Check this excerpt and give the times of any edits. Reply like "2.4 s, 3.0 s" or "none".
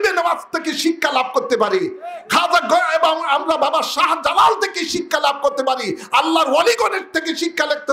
none